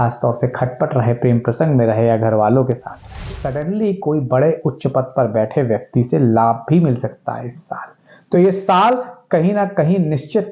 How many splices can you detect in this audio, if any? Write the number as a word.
one